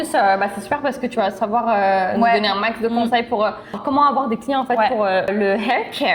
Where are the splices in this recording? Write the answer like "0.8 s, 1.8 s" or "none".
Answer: 3.8 s, 5.3 s

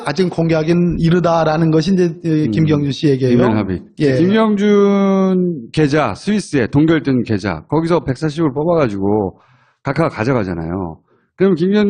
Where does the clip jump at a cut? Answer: none

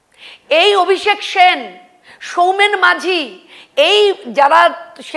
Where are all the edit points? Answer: none

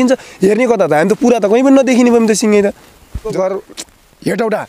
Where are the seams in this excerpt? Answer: 3.2 s

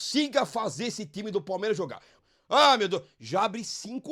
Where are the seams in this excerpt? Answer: 2.1 s

